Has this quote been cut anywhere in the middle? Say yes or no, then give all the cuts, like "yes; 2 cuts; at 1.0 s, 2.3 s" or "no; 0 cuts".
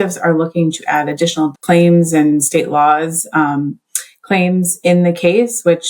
yes; 1 cut; at 1.2 s